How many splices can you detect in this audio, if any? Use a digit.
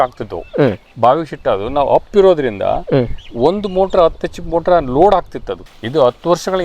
1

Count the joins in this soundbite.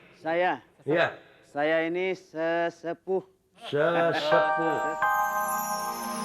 1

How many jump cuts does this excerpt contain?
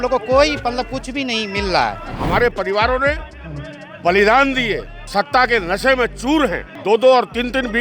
3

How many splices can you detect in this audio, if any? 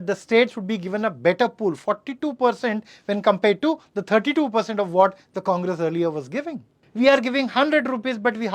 1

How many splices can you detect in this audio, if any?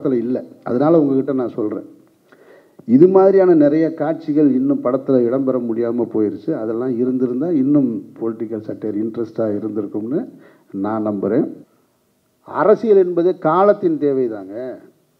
1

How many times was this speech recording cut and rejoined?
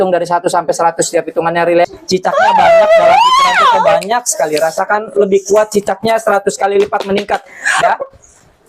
1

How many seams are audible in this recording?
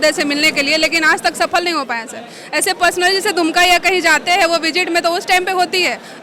0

